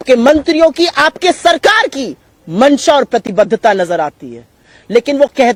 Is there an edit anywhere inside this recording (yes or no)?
no